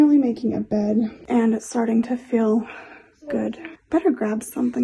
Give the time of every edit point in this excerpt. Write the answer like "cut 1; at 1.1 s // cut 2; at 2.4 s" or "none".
cut 1; at 3.7 s